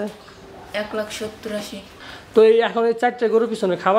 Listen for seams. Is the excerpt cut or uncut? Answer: cut